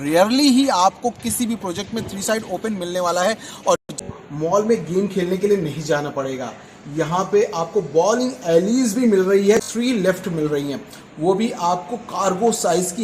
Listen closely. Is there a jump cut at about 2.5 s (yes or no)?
no